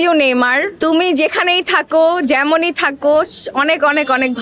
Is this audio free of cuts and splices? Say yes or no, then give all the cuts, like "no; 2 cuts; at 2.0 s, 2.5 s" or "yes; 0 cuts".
yes; 0 cuts